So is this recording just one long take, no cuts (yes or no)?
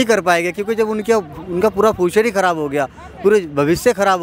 yes